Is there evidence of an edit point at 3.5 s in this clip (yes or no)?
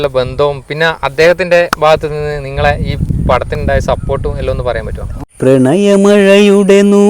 no